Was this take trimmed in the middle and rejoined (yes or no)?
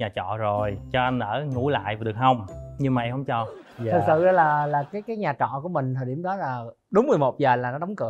no